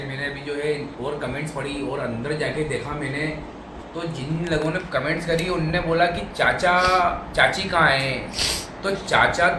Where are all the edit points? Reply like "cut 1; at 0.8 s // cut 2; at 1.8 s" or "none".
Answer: none

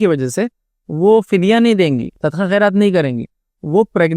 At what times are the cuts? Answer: cut 1; at 2.2 s

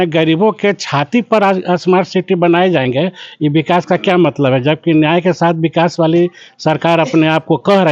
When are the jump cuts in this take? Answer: none

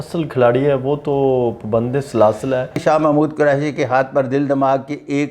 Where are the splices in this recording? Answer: cut 1; at 2.8 s

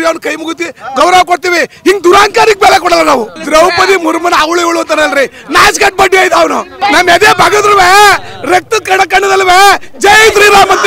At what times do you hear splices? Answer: cut 1; at 3.4 s // cut 2; at 6.8 s

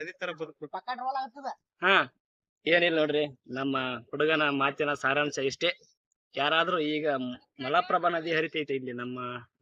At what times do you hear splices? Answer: cut 1; at 2.6 s

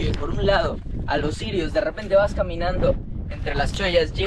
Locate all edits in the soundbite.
none

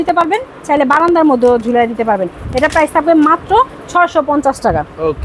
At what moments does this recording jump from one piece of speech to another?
none

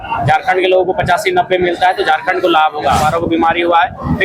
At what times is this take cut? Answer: cut 1; at 3.0 s

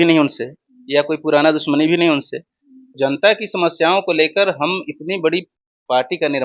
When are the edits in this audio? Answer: cut 1; at 2.9 s

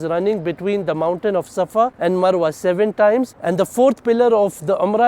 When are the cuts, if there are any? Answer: cut 1; at 2.0 s // cut 2; at 3.4 s

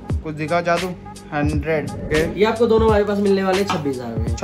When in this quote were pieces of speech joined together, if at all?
cut 1; at 2.0 s

